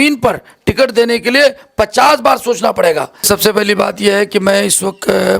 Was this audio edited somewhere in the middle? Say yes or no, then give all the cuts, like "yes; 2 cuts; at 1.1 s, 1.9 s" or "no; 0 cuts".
yes; 1 cut; at 3.2 s